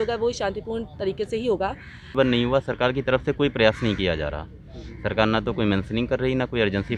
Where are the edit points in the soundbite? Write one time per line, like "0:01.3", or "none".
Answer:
0:02.1